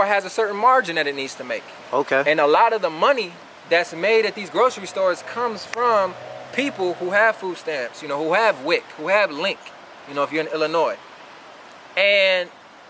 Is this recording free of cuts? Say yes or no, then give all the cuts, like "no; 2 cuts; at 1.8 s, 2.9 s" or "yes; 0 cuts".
yes; 0 cuts